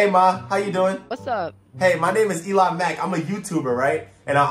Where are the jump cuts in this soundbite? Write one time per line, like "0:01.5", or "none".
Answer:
0:01.1